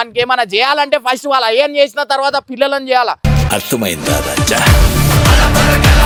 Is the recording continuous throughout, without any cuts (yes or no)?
yes